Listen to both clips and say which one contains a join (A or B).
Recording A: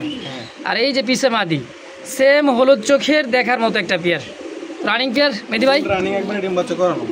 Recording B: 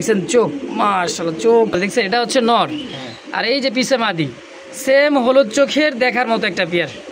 B